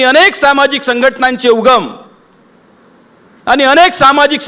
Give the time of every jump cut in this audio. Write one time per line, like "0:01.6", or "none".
none